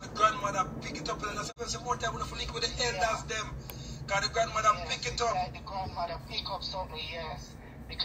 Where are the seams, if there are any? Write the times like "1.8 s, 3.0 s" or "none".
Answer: 1.5 s